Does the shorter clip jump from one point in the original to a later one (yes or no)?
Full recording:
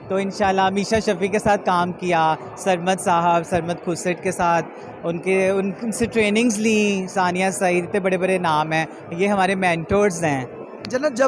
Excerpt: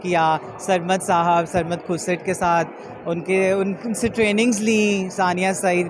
no